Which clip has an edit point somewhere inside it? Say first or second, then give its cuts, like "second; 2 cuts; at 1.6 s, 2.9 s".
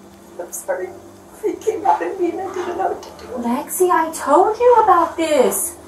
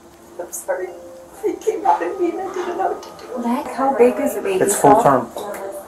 second; 1 cut; at 3.7 s